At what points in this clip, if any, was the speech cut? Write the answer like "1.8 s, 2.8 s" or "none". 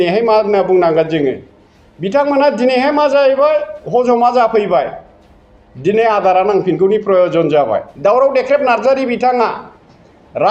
7.9 s